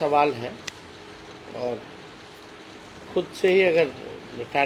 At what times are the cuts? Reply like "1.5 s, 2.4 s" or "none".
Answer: none